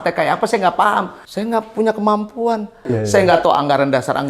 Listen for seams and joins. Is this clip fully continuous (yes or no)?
no